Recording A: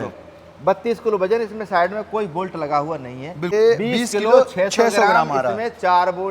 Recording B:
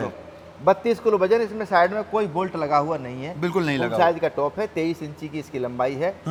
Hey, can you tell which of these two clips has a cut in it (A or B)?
A